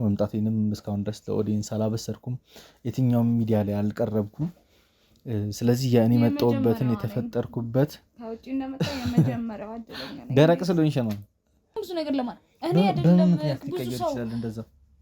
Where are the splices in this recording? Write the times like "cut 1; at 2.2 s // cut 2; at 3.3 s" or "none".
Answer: cut 1; at 11.8 s